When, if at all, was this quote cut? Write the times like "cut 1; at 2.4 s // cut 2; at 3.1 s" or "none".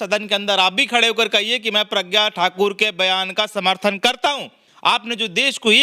cut 1; at 4.7 s